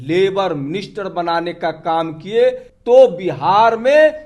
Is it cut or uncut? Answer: cut